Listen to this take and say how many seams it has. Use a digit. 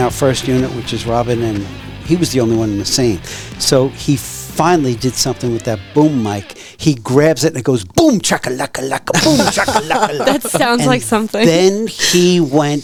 0